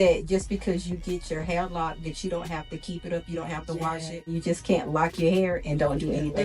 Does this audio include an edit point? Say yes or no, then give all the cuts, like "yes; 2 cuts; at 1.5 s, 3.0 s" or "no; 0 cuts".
yes; 1 cut; at 4.4 s